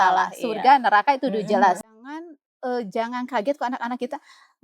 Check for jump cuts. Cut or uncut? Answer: cut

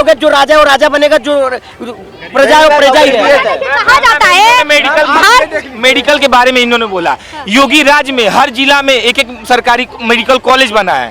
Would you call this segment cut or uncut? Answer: uncut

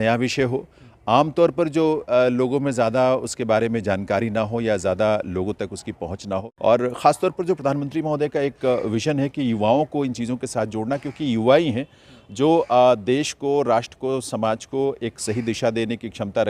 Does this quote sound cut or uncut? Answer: cut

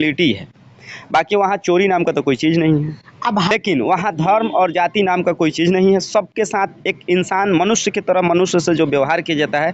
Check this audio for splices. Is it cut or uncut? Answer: cut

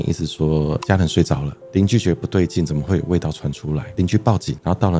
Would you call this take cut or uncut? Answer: cut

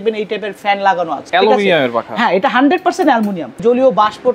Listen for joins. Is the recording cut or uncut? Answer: cut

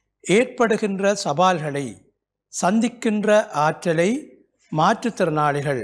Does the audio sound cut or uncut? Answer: uncut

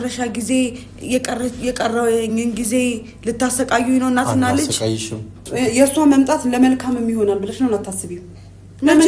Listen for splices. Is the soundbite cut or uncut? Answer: cut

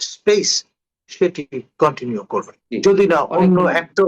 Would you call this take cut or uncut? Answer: cut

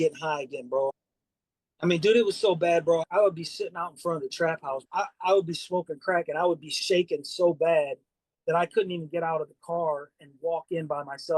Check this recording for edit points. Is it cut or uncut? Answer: cut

